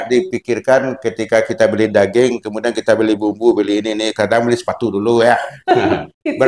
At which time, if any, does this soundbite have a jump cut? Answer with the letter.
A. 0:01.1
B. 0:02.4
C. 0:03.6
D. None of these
D